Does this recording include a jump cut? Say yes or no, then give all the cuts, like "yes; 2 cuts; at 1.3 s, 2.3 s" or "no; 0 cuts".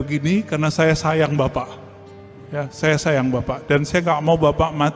no; 0 cuts